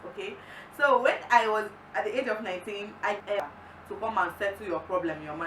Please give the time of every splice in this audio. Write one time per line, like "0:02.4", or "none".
0:03.3